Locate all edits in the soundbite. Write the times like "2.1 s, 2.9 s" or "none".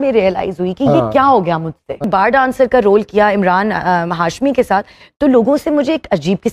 2.0 s